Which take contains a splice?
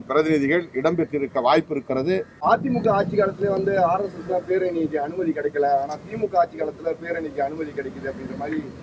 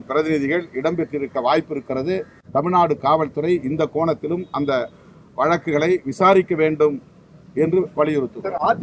first; 1 cut; at 2.4 s

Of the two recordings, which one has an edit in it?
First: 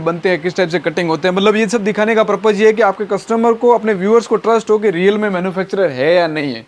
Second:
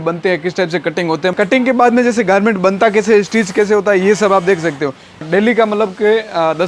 second; 2 cuts; at 1.3 s, 5.2 s

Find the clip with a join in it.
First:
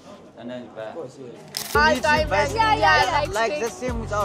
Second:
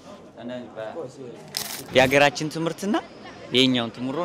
first; 1 cut; at 1.8 s

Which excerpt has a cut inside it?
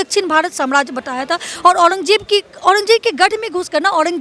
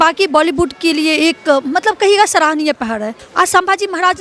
second; 1 cut; at 3.2 s

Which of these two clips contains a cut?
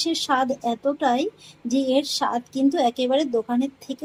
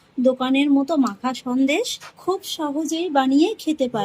second; 1 cut; at 2.0 s

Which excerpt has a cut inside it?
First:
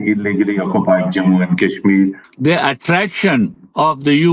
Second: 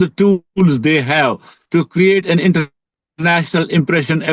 first; 1 cut; at 2.3 s

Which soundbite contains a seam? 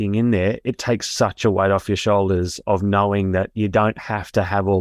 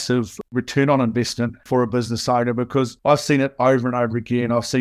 second; 2 cuts; at 1.6 s, 2.9 s

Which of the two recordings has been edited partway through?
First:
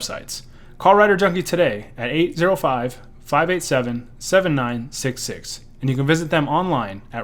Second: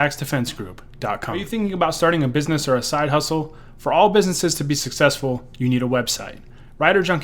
second; 1 cut; at 1.4 s

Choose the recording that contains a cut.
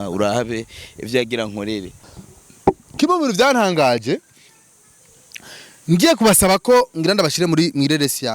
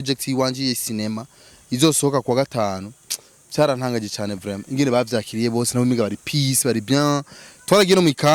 first; 1 cut; at 2.1 s

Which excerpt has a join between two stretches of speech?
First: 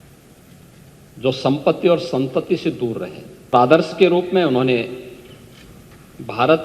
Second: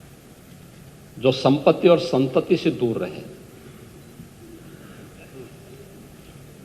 first; 1 cut; at 3.5 s

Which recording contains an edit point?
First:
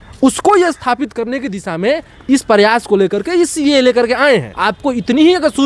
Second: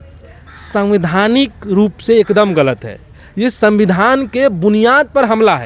first; 1 cut; at 4.6 s

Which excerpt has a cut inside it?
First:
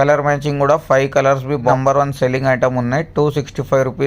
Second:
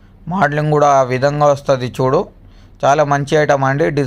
first; 1 cut; at 1.7 s

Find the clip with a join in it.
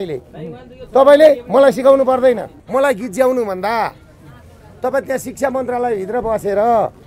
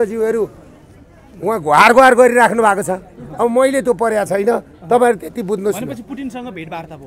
first; 1 cut; at 2.5 s

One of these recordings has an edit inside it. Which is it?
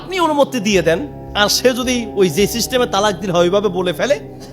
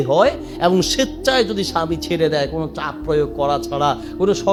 first; 1 cut; at 1.2 s

